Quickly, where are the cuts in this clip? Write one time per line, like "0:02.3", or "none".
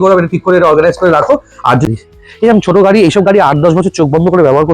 0:01.9